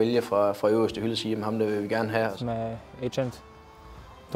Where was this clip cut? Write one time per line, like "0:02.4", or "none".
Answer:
0:02.3